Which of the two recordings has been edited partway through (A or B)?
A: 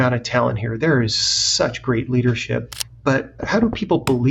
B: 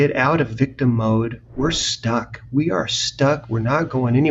A